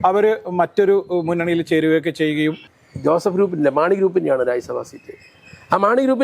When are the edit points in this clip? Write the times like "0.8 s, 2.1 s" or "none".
2.7 s